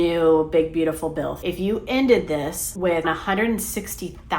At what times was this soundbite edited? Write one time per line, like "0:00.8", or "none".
0:01.4
0:03.0